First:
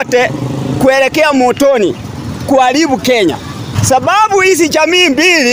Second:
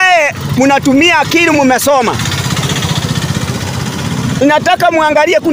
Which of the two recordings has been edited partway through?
first; 1 cut; at 3.7 s

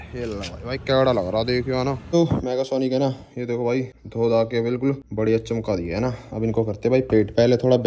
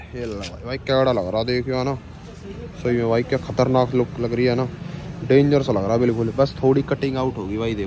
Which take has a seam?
first; 3 cuts; at 2.1 s, 4.0 s, 5.1 s

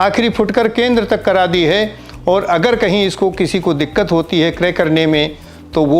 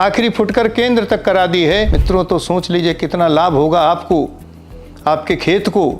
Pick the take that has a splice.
second; 1 cut; at 2.0 s

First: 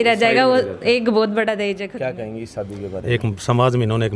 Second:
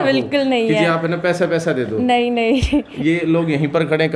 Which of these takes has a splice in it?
first; 1 cut; at 1.9 s

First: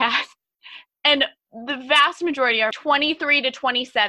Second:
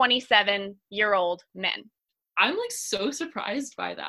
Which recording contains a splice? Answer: first; 1 cut; at 2.7 s

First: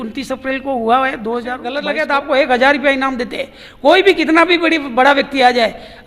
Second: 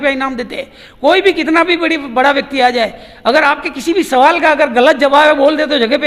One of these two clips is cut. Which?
first; 1 cut; at 1.8 s

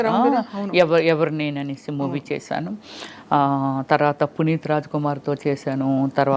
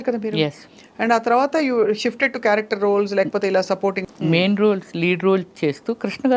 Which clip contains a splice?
second; 1 cut; at 4.0 s

